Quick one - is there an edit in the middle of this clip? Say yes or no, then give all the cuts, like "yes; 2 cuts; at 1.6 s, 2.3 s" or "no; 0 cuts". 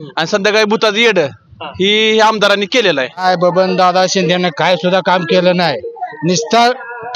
yes; 1 cut; at 3.2 s